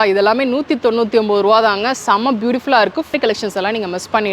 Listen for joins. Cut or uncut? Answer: cut